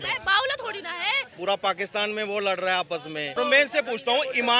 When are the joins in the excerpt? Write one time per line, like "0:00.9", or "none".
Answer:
0:01.3
0:03.3